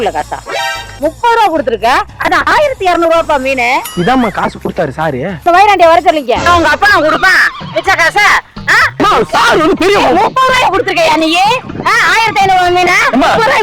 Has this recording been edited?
yes; 3 cuts; at 0.9 s, 5.4 s, 6.4 s

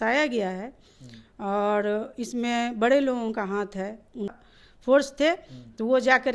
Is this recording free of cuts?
no; 1 cut; at 4.3 s

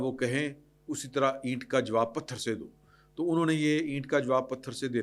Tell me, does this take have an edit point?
no; 0 cuts

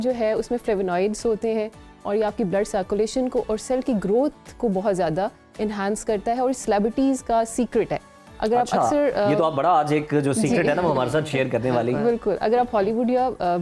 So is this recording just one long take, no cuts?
yes; 0 cuts

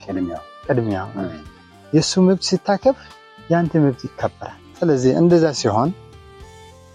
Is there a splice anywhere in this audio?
no; 0 cuts

